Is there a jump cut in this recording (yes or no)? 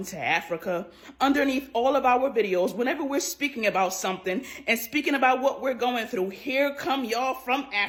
no